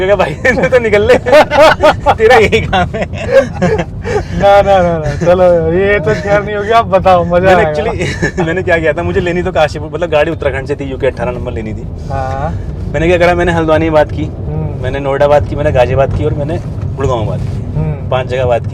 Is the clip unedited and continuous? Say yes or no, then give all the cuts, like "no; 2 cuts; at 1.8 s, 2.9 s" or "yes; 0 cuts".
yes; 0 cuts